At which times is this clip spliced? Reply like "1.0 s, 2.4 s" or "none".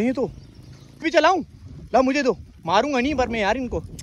1.0 s